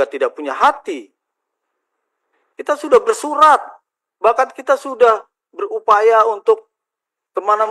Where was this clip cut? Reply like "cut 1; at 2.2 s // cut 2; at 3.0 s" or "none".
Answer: none